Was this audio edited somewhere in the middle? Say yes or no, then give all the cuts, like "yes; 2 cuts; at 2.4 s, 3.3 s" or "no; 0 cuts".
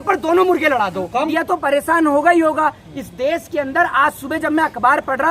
yes; 1 cut; at 1.3 s